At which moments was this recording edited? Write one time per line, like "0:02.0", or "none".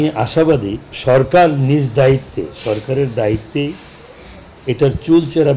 0:00.9